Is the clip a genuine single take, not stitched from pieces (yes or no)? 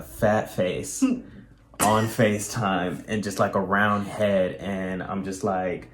yes